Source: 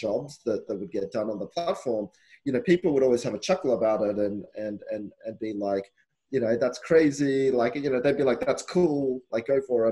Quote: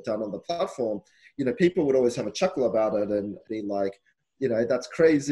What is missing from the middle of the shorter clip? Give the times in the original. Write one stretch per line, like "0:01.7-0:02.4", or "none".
0:04.5-0:05.3